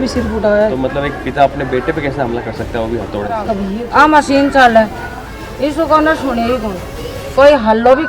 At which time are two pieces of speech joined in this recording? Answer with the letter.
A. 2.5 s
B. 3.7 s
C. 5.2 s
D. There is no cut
B